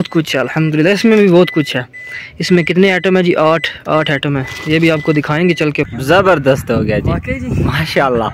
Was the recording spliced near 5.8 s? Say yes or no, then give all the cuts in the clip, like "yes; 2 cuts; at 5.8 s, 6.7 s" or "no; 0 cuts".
yes; 1 cut; at 5.8 s